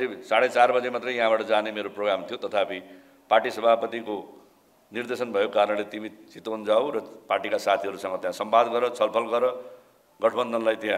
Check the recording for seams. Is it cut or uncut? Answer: uncut